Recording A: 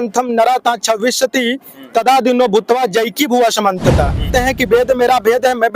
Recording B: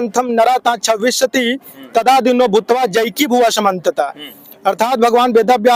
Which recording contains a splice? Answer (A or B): A